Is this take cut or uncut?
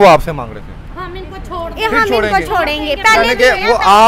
uncut